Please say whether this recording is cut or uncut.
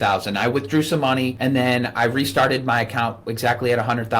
cut